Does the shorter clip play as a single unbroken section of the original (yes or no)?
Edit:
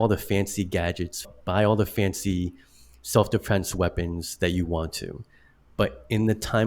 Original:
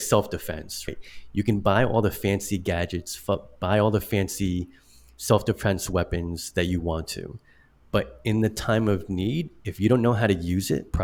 no